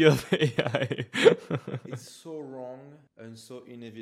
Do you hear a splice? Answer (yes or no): yes